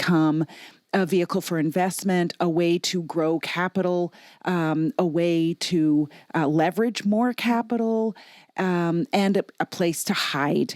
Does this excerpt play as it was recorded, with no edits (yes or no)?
yes